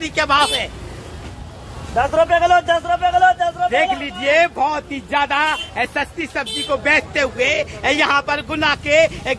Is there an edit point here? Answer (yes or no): no